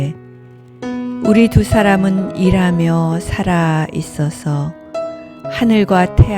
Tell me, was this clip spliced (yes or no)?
no